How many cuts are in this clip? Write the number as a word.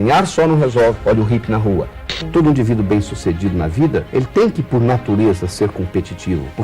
one